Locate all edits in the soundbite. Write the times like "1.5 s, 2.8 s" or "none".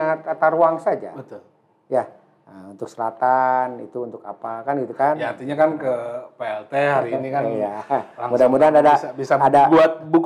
none

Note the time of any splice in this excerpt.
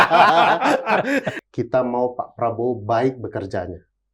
1.3 s

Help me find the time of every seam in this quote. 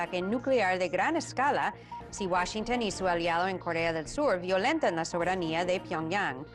none

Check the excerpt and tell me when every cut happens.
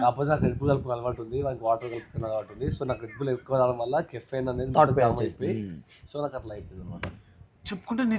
none

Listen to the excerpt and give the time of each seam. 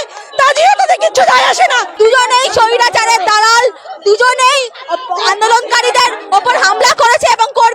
1.9 s

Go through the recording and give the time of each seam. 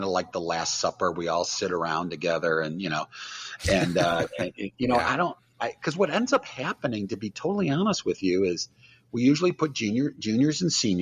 none

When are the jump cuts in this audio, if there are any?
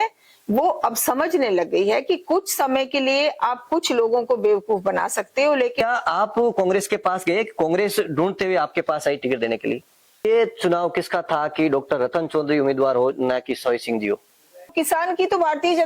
5.7 s, 10.2 s, 14.7 s

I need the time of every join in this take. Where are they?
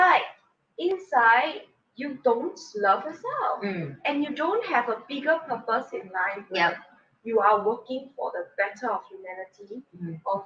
none

